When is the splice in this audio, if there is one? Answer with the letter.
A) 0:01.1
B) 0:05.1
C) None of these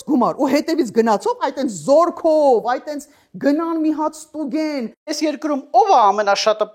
B